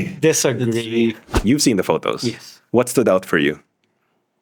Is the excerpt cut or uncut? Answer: cut